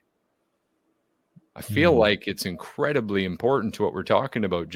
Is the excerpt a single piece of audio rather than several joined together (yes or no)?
yes